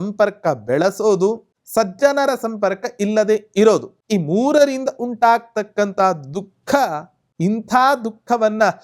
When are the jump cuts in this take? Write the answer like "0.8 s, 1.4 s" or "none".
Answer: 1.5 s, 3.9 s